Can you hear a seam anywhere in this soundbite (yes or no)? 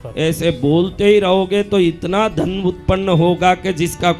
no